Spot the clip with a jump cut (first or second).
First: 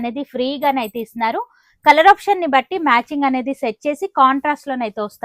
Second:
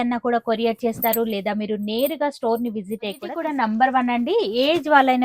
second